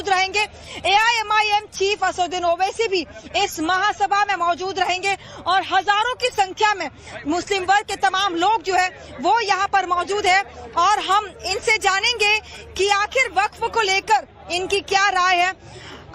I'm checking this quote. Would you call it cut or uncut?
cut